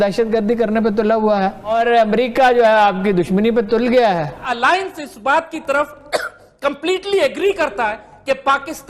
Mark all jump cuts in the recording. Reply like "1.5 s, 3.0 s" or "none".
1.7 s, 4.4 s